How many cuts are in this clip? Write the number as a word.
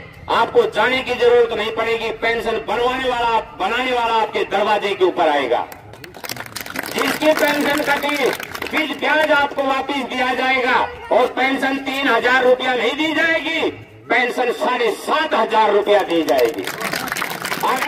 zero